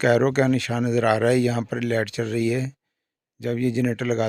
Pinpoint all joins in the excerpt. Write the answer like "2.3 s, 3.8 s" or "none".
none